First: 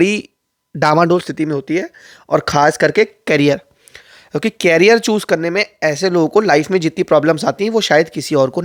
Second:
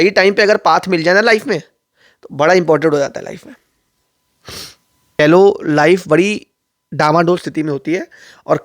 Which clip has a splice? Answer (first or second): second